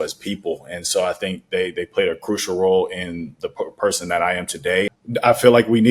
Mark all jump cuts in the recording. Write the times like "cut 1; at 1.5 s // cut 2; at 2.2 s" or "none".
cut 1; at 4.9 s